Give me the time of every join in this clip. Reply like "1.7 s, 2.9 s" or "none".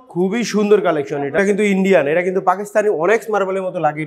1.4 s